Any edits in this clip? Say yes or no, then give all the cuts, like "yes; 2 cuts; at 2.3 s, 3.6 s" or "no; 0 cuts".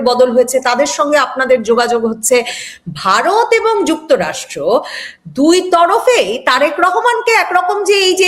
no; 0 cuts